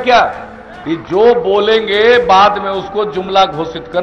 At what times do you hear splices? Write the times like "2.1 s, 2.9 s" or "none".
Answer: none